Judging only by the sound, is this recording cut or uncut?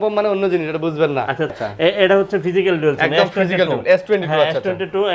cut